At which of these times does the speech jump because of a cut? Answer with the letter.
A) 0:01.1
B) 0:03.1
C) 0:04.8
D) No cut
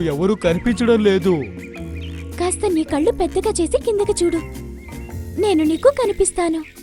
D